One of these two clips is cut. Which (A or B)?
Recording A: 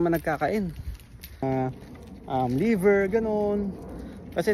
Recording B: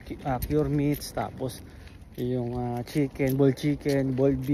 A